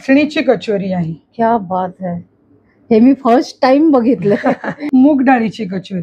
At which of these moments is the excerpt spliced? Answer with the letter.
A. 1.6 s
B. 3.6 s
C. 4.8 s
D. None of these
C